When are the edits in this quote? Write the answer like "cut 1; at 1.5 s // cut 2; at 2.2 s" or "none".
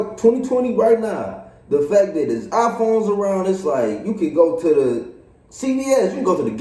none